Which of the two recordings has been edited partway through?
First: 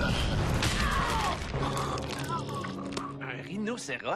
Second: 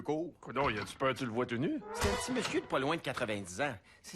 second; 1 cut; at 2.1 s

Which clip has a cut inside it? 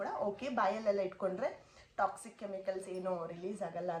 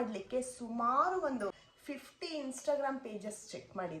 second; 1 cut; at 1.5 s

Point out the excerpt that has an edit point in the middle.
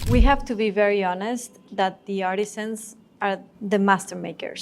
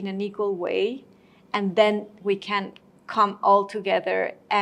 first; 1 cut; at 3.5 s

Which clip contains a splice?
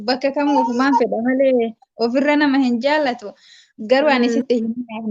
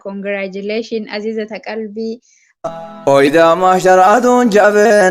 second; 1 cut; at 2.6 s

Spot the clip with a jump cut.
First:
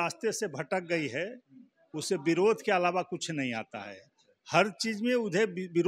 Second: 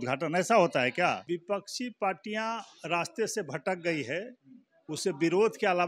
second; 1 cut; at 1.3 s

